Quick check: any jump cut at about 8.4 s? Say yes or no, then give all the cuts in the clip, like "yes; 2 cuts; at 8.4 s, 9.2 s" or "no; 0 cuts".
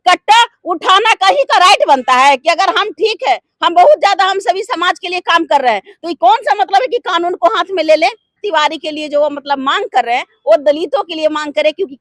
yes; 1 cut; at 8.4 s